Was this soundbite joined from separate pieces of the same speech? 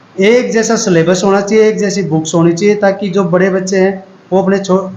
no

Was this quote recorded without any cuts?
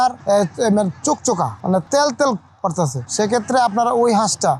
yes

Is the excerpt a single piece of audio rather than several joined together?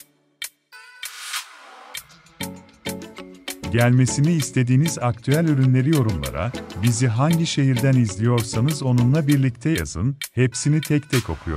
no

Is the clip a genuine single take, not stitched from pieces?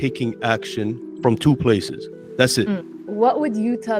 no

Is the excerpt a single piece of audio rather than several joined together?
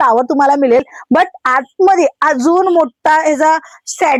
yes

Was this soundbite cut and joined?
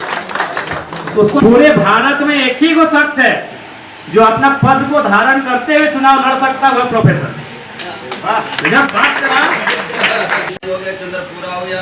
yes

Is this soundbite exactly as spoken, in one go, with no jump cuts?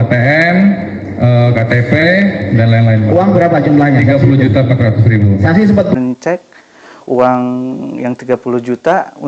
no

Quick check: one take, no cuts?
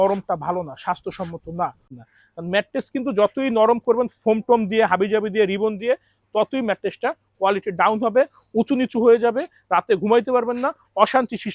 no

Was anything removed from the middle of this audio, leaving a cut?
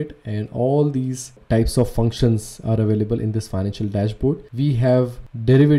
yes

